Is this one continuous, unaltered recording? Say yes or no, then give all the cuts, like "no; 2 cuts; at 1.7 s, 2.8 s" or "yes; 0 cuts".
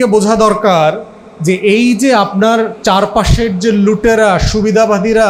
yes; 0 cuts